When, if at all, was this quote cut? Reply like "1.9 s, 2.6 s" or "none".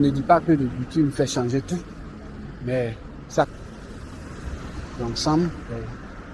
3.5 s